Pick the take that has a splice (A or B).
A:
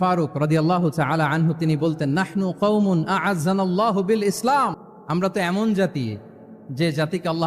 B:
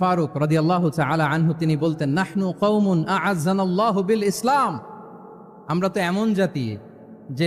A